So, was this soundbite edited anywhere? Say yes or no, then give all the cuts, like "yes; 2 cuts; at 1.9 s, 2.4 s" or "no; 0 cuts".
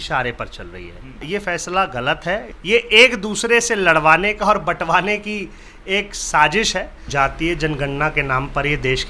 yes; 3 cuts; at 1.2 s, 2.5 s, 7.0 s